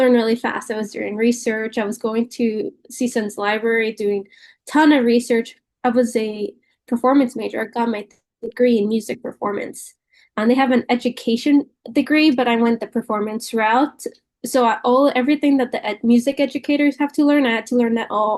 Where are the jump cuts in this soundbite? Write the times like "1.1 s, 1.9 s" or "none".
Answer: none